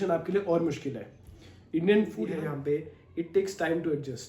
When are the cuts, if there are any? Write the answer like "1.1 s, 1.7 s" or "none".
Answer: 2.2 s